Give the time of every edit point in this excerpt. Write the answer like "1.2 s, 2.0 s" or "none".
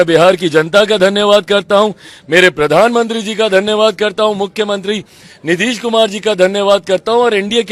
none